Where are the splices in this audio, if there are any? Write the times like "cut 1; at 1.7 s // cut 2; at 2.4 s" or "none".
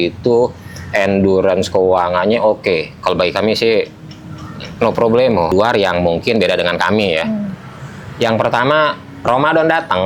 cut 1; at 5.5 s